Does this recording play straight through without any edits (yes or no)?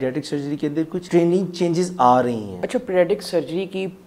no